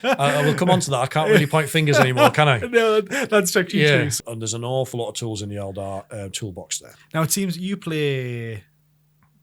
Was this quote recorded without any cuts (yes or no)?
no